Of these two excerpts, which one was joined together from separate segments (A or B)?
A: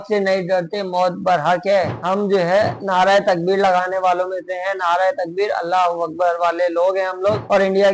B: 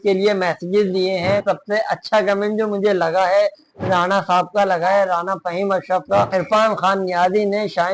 B